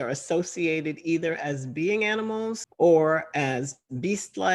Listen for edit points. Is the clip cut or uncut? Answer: cut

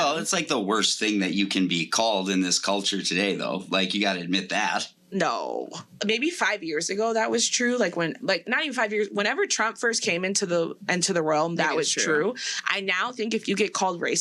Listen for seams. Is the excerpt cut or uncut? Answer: cut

